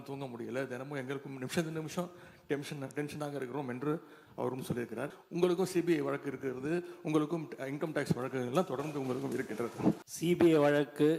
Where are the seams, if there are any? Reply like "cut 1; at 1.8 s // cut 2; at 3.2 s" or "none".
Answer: cut 1; at 5.2 s // cut 2; at 10.1 s